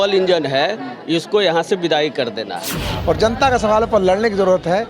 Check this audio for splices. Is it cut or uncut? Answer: cut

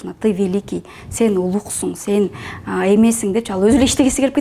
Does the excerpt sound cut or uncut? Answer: uncut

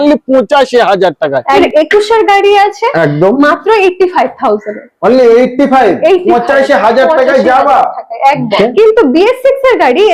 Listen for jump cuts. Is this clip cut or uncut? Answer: cut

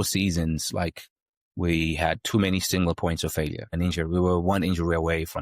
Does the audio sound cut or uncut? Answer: cut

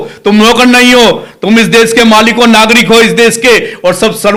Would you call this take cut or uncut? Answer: uncut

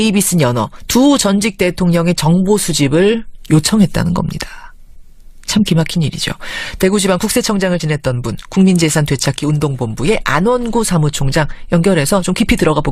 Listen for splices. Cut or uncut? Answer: cut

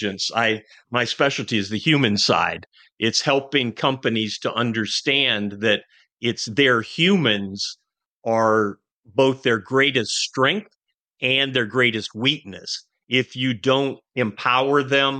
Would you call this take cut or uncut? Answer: uncut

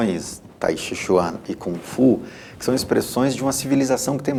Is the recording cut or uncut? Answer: uncut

